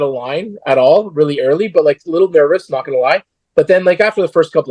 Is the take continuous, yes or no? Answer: yes